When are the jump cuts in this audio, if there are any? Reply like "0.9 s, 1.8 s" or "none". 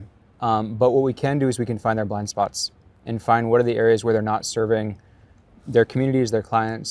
none